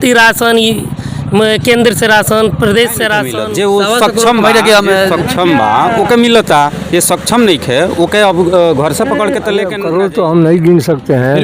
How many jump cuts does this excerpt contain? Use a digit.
2